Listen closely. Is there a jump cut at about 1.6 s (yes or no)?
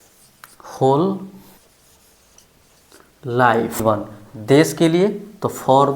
yes